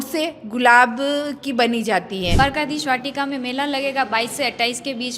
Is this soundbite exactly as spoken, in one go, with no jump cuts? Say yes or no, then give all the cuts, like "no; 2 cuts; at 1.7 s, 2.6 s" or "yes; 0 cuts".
no; 1 cut; at 2.4 s